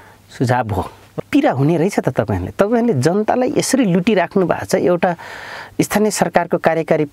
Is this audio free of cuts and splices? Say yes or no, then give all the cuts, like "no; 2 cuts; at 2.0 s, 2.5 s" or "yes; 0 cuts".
no; 1 cut; at 1.1 s